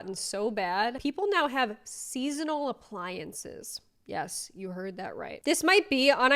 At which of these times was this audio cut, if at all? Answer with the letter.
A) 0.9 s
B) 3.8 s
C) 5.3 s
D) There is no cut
C